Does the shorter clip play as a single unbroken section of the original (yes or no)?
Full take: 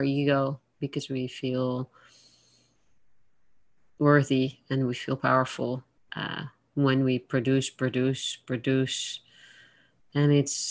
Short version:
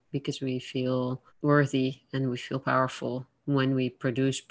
no